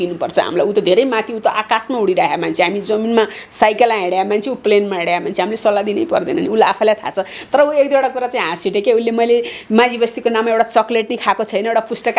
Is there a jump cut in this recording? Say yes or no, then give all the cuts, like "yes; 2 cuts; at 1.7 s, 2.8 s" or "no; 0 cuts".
no; 0 cuts